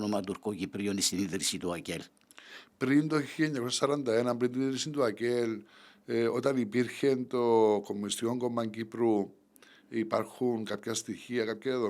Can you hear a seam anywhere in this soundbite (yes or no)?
no